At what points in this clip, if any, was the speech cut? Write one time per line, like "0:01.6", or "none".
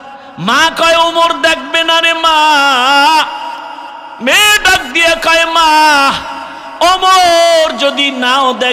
none